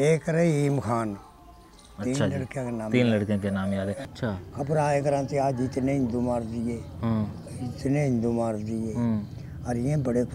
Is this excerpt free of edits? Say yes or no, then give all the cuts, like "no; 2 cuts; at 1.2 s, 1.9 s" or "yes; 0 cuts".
no; 1 cut; at 4.1 s